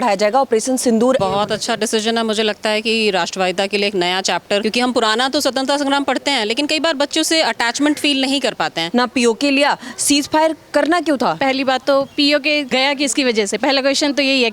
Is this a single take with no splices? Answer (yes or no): no